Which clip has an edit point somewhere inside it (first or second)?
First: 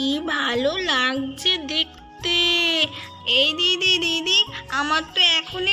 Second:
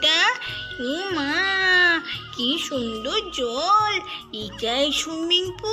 first